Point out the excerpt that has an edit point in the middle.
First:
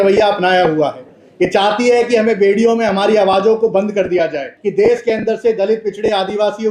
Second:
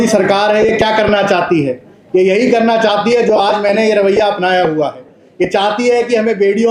first; 1 cut; at 4.6 s

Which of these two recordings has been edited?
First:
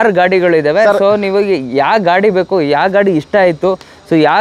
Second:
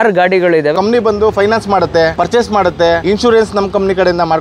second; 3 cuts; at 0.7 s, 2.1 s, 3.0 s

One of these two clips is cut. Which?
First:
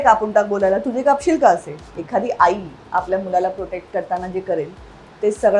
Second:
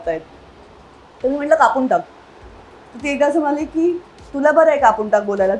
first; 1 cut; at 2.0 s

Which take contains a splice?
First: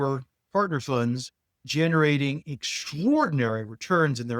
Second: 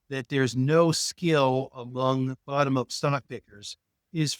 first; 1 cut; at 1.7 s

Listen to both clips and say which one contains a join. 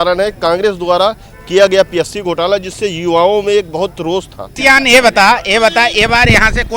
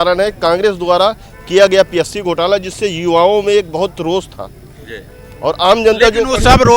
first; 1 cut; at 4.5 s

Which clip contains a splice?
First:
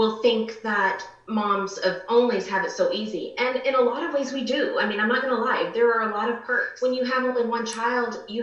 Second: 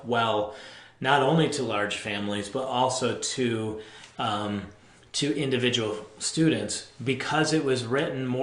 first; 1 cut; at 6.7 s

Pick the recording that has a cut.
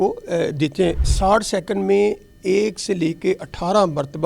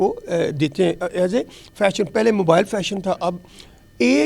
first; 1 cut; at 1.0 s

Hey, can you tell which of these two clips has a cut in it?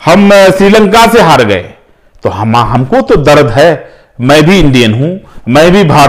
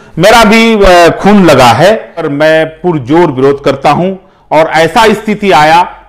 second; 1 cut; at 2.3 s

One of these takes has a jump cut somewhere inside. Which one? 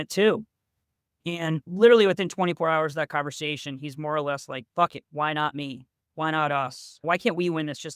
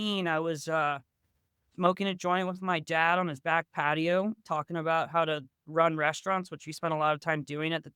first; 2 cuts; at 1.7 s, 6.9 s

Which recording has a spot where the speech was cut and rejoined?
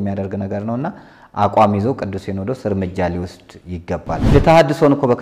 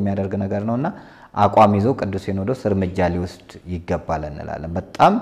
first; 1 cut; at 4.2 s

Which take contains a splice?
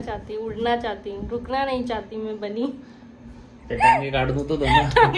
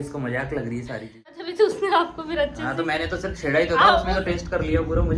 second; 1 cut; at 1.4 s

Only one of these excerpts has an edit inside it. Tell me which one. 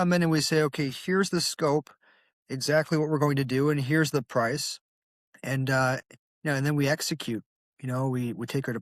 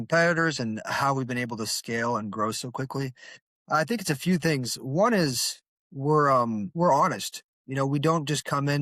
second; 1 cut; at 6.7 s

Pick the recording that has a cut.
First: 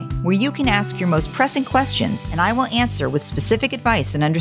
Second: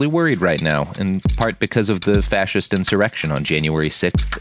first; 1 cut; at 2.2 s

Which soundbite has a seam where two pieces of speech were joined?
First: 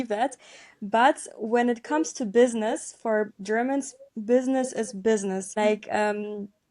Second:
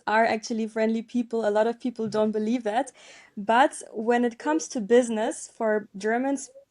first; 1 cut; at 5.5 s

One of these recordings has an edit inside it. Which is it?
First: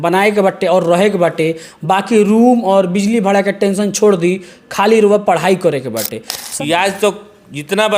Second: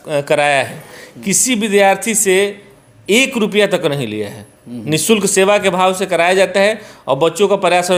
first; 1 cut; at 6.4 s

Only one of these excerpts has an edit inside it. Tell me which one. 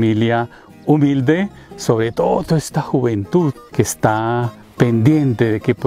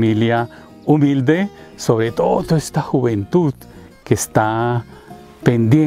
first; 2 cuts; at 3.6 s, 4.6 s

